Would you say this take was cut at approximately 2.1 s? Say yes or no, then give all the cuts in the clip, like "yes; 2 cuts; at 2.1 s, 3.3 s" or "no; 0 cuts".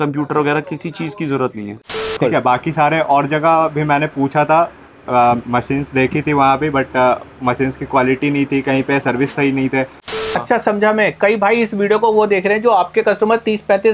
yes; 2 cuts; at 2.1 s, 10.3 s